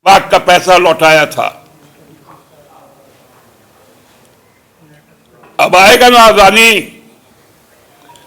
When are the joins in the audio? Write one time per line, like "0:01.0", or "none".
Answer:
none